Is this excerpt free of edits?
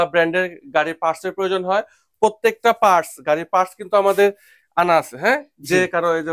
yes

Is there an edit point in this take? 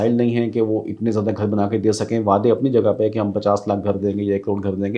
no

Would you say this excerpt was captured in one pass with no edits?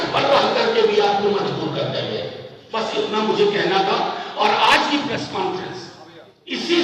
yes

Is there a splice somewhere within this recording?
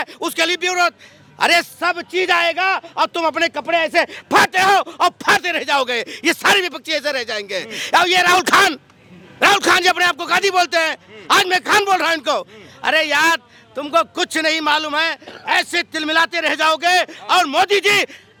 no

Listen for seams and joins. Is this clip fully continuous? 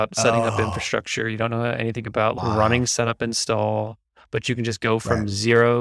no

